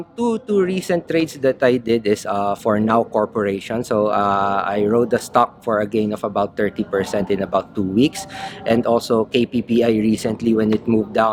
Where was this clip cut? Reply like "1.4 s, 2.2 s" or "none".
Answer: none